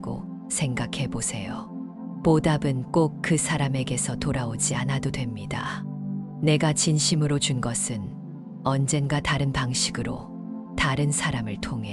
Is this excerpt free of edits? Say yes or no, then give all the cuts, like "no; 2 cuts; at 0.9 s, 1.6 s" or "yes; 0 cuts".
yes; 0 cuts